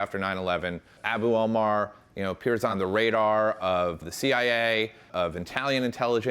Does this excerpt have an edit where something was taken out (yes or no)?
yes